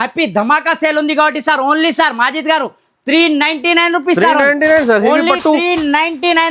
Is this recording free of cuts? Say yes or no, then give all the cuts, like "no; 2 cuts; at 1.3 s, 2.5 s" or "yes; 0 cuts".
yes; 0 cuts